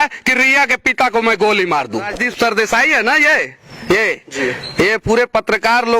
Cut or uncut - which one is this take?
cut